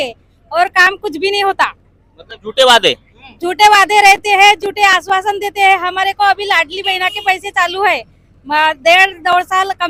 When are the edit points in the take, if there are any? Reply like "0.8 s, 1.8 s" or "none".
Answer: none